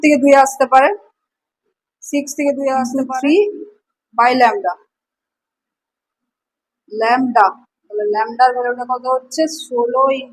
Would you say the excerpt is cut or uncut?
cut